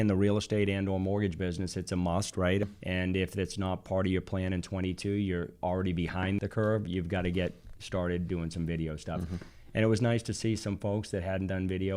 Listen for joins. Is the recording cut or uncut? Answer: cut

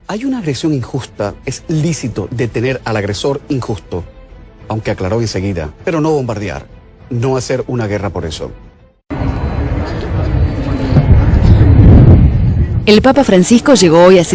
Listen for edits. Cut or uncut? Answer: cut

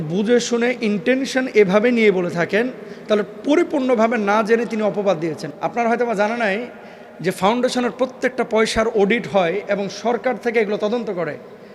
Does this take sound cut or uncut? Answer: cut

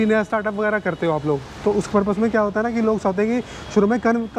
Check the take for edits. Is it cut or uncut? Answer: uncut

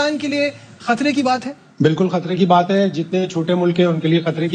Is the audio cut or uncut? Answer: uncut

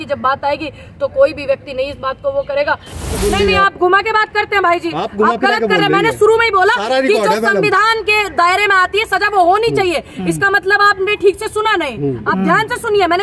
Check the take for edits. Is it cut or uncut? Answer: cut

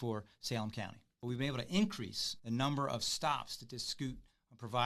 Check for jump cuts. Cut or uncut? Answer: cut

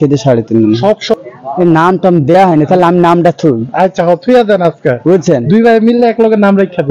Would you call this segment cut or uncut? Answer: cut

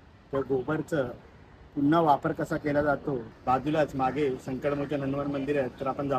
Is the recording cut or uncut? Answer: cut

